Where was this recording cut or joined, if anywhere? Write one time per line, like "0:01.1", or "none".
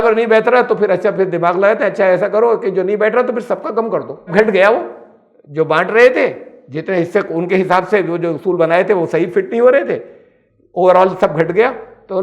0:04.3